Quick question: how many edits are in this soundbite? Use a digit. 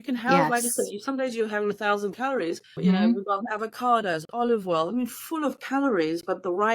1